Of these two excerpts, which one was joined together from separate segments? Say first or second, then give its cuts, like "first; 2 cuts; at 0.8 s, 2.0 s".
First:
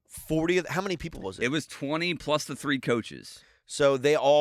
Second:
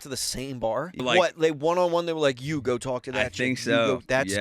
second; 1 cut; at 1.0 s